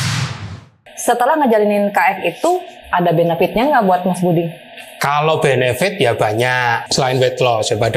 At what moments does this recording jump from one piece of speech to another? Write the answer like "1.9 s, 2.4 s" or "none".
0.9 s, 6.8 s